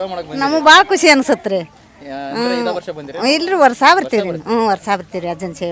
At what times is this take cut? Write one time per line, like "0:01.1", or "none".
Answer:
none